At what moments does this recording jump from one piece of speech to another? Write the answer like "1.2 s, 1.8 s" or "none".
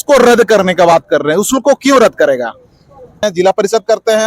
3.3 s